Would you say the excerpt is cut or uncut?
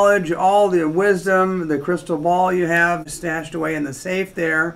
cut